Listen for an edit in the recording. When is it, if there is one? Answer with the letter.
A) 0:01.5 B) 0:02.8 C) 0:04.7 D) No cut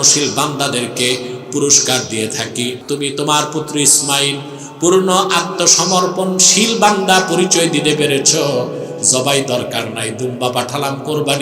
B